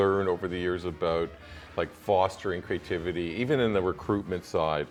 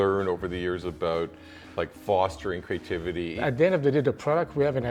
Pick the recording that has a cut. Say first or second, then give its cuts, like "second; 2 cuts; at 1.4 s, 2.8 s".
second; 1 cut; at 3.4 s